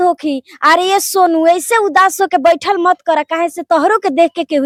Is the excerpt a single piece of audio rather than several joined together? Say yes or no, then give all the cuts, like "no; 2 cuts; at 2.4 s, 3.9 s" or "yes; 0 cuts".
yes; 0 cuts